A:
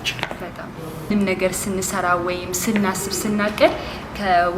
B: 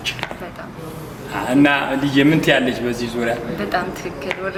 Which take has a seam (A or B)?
A